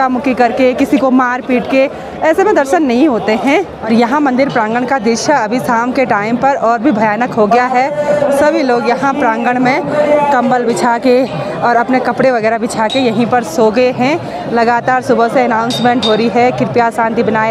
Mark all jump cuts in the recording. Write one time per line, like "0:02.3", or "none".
none